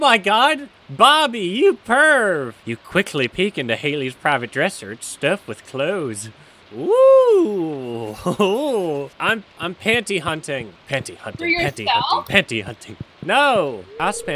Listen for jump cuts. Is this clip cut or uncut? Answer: uncut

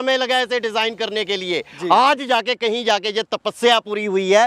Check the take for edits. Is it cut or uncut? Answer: uncut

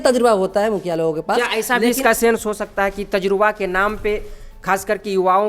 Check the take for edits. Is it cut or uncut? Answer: uncut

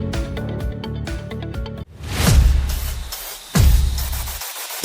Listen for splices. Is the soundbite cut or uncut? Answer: cut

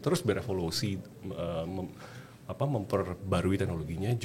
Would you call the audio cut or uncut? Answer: uncut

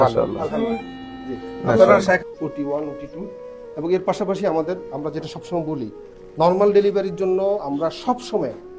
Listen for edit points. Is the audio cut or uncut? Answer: cut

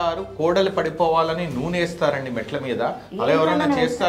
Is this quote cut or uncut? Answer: uncut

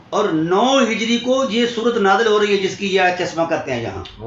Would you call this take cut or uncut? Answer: uncut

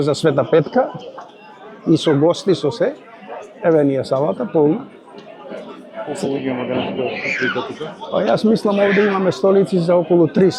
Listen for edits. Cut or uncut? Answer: uncut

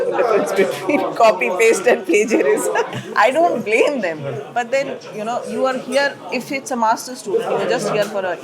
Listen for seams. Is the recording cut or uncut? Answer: cut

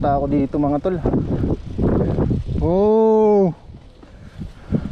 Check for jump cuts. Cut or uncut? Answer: cut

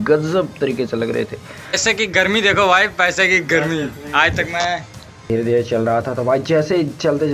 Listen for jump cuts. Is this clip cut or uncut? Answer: cut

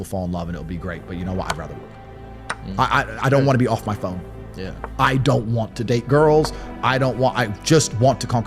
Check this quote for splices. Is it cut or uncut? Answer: uncut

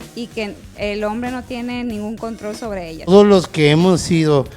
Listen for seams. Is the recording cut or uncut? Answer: cut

